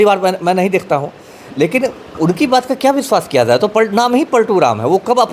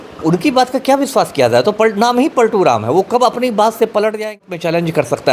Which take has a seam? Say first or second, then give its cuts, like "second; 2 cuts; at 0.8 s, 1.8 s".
second; 1 cut; at 4.3 s